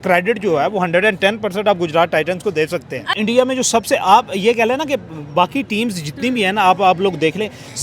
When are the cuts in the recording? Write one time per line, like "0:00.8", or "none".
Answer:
0:03.1